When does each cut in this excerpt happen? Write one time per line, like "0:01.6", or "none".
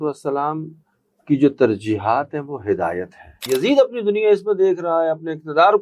0:03.3